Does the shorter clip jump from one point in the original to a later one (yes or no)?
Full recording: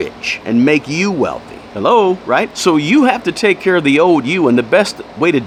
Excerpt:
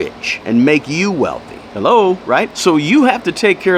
no